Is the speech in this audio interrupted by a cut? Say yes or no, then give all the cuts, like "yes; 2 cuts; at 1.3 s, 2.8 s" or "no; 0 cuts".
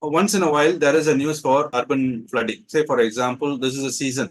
yes; 1 cut; at 1.7 s